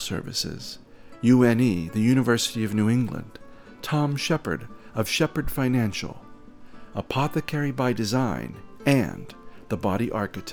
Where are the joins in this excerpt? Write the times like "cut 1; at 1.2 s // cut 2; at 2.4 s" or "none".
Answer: none

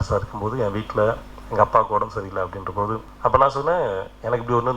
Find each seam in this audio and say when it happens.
cut 1; at 3.0 s

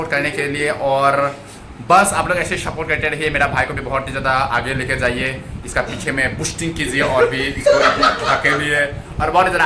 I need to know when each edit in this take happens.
none

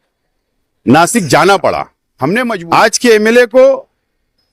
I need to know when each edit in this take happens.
cut 1; at 2.4 s

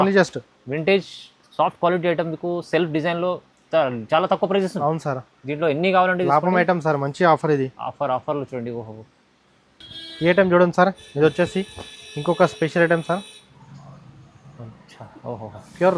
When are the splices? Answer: none

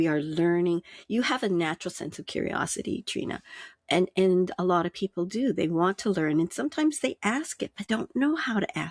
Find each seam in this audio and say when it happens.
cut 1; at 7.8 s

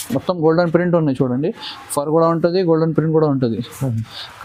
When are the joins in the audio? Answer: none

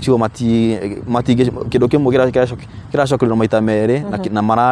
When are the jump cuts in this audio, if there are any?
none

